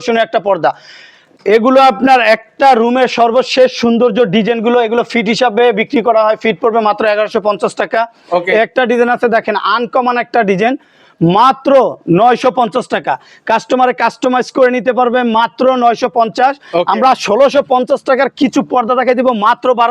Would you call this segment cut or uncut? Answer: uncut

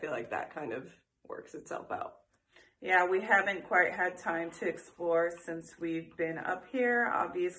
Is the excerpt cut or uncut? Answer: uncut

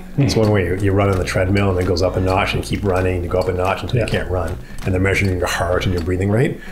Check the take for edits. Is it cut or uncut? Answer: uncut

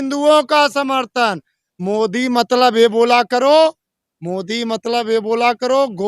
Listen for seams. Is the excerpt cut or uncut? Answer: uncut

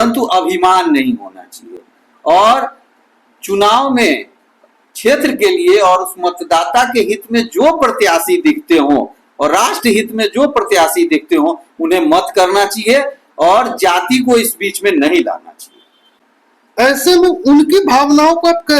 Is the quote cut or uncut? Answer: uncut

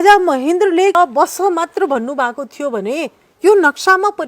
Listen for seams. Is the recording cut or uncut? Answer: cut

